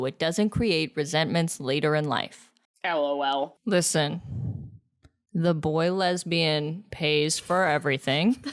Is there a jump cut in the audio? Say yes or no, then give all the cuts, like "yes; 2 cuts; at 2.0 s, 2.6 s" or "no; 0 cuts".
yes; 1 cut; at 3.5 s